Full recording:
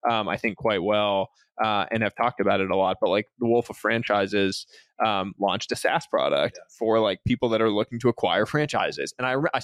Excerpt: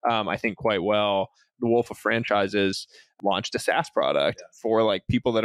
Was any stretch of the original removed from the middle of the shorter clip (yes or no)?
yes